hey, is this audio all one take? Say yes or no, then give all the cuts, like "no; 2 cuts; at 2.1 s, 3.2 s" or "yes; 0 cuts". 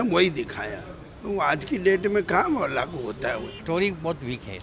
no; 1 cut; at 3.5 s